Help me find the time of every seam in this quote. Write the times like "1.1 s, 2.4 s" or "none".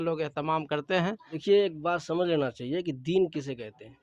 1.4 s